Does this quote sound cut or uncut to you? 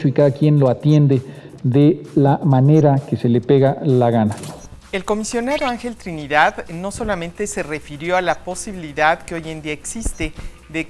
uncut